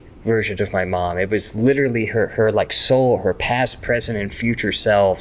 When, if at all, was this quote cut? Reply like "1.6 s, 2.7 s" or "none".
none